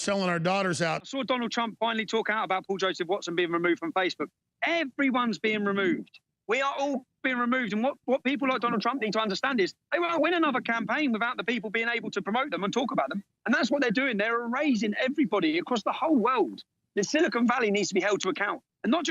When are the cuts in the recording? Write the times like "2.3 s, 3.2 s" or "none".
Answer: 1.0 s